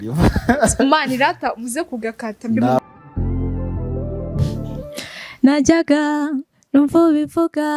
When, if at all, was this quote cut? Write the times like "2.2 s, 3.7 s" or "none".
2.8 s, 4.8 s